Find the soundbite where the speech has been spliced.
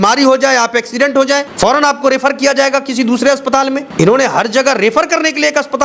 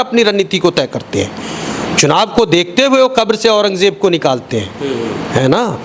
first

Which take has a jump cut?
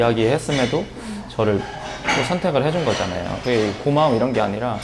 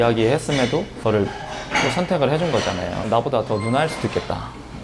second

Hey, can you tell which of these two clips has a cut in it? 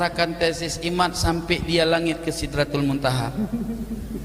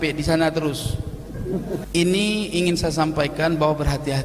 second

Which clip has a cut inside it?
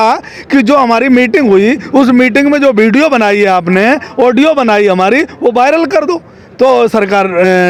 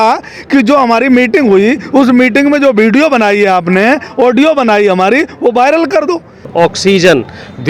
second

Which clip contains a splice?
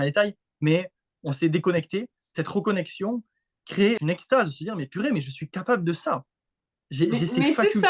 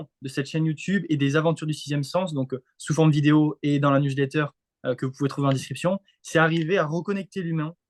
first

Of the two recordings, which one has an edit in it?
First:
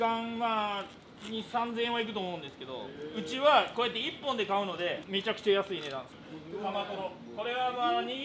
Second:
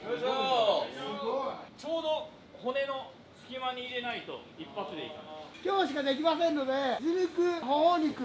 first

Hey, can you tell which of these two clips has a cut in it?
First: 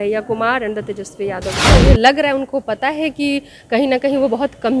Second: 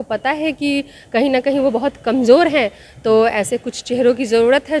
first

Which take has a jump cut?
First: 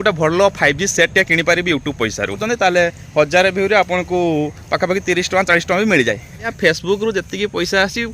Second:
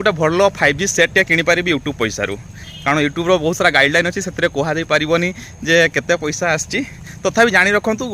first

